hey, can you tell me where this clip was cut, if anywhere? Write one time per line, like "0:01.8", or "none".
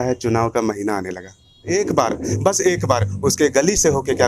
0:01.7